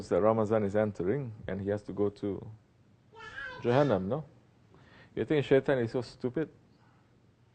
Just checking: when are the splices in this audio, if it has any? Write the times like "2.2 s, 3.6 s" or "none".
5.6 s